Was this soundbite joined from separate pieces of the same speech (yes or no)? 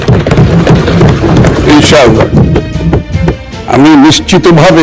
yes